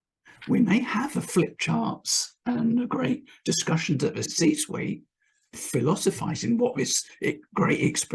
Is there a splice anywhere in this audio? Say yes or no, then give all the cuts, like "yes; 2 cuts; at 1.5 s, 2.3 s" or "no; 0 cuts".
no; 0 cuts